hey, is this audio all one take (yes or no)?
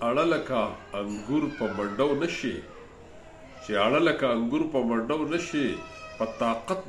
yes